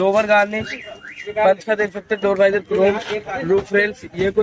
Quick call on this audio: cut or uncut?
uncut